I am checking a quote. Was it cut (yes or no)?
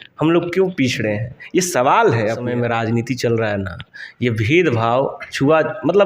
yes